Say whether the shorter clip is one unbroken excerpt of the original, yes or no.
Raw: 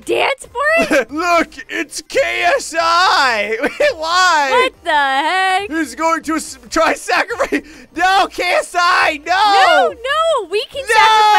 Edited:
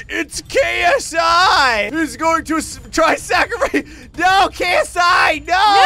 no